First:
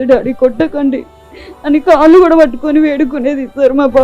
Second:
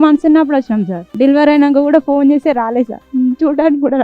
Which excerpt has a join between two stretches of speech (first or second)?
second